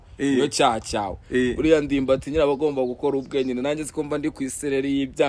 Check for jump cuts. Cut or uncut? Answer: uncut